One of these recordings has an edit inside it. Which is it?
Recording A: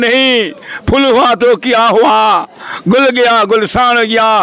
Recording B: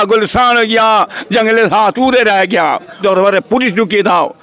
B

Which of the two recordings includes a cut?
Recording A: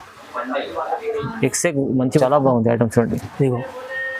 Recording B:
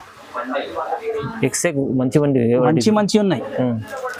A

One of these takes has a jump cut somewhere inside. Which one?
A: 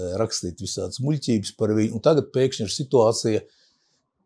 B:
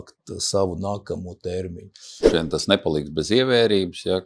B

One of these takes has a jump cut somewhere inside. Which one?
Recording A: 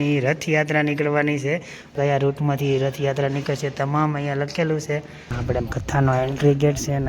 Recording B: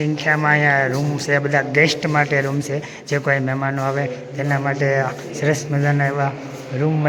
A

